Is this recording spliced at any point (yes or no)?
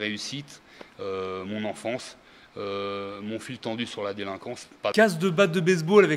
yes